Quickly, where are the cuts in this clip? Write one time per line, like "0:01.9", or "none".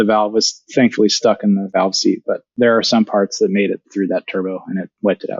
0:02.5
0:03.9

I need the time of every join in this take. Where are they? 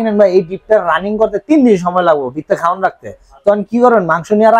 none

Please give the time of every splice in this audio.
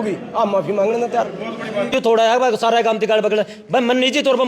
0:01.9

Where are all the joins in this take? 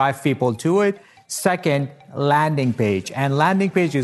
0:01.1

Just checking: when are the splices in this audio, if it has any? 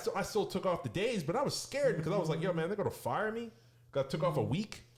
none

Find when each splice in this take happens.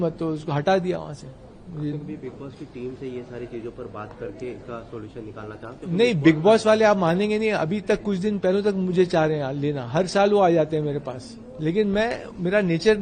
none

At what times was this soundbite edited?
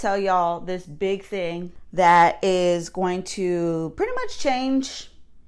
0:01.8

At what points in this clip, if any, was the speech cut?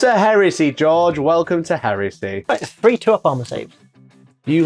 0:02.5

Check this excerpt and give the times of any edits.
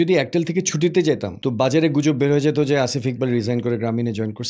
0:01.3

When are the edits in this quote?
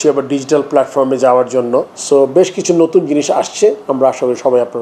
0:02.0

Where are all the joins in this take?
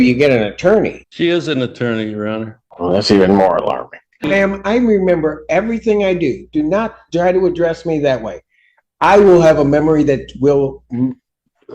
0:01.0
0:02.6
0:04.3

